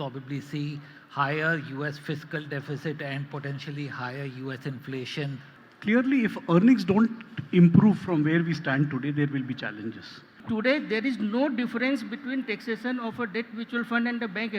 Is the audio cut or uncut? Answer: cut